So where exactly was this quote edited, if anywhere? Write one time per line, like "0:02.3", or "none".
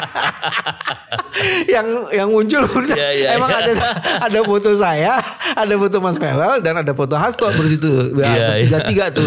none